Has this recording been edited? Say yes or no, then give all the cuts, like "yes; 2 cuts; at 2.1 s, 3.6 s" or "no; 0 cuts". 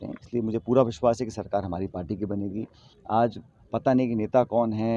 yes; 1 cut; at 2.9 s